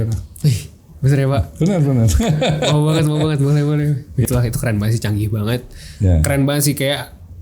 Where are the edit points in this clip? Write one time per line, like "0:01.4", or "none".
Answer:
0:04.2

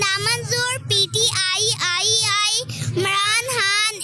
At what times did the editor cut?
none

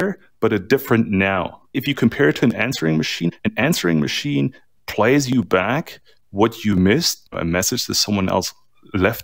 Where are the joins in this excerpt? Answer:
0:01.8

